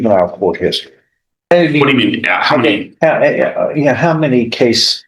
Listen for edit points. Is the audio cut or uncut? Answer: cut